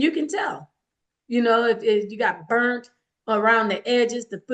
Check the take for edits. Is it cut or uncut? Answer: uncut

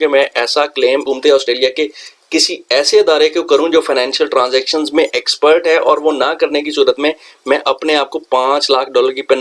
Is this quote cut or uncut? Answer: uncut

